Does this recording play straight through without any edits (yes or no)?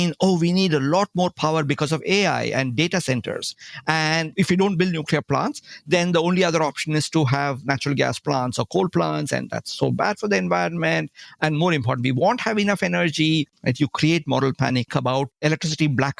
no